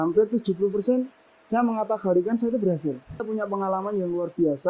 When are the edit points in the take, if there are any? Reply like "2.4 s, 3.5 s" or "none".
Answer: 3.2 s